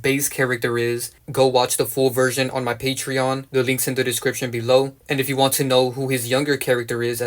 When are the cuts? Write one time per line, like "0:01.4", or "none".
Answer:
0:01.2
0:05.0